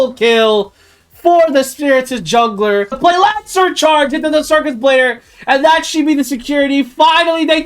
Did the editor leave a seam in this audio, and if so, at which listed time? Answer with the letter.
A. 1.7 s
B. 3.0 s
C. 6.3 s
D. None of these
B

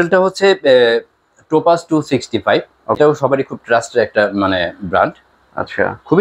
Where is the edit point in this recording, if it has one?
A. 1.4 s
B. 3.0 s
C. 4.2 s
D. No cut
B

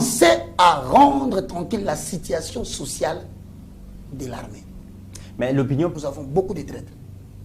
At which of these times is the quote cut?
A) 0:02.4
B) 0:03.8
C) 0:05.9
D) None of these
C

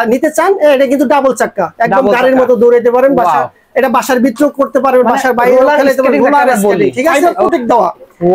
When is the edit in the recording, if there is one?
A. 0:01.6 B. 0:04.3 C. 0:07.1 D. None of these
C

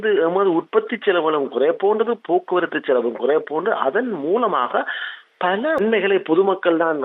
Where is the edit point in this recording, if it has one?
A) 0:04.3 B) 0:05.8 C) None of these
B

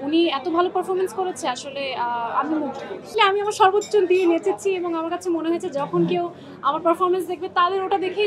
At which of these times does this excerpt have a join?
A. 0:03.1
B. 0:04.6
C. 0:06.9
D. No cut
A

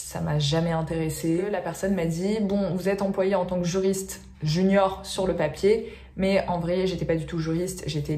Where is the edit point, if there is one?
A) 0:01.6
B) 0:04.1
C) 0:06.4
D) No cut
A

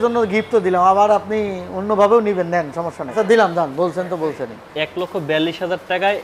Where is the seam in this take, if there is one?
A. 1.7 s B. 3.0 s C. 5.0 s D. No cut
B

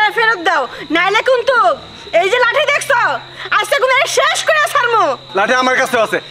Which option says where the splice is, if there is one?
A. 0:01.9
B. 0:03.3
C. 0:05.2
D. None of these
C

